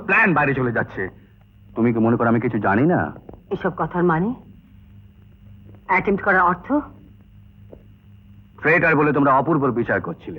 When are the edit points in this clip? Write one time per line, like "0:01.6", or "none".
none